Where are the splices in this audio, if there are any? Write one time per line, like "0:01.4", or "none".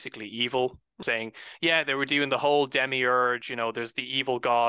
0:01.0